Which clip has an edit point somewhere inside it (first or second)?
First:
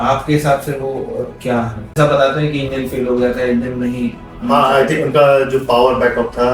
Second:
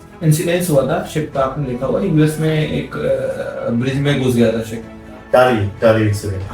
first